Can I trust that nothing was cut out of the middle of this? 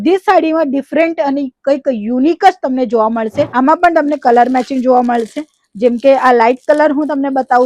no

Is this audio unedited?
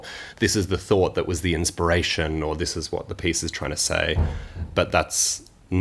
no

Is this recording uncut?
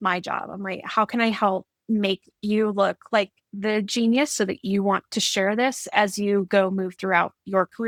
yes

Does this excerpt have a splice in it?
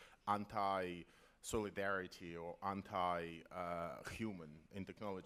no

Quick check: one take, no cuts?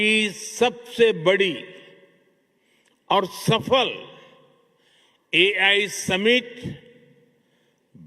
yes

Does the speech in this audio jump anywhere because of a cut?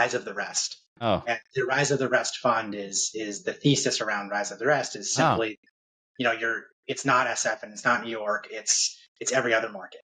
no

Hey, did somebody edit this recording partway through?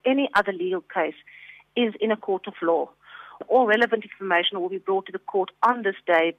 yes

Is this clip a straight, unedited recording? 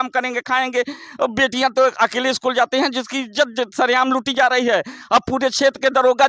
yes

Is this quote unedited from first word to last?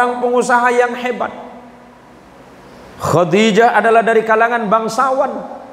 yes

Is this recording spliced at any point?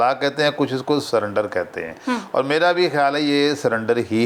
no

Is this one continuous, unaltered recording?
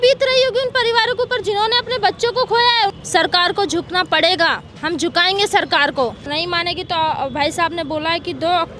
no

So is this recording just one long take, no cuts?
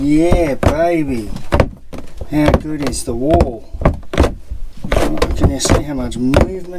yes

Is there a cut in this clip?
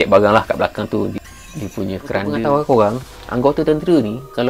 yes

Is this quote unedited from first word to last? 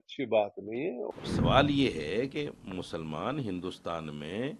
no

